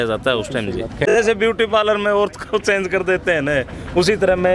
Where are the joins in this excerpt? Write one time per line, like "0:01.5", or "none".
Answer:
0:01.0